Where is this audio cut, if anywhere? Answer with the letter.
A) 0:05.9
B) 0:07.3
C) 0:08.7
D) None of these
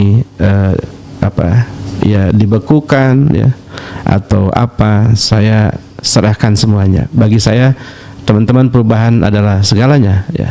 D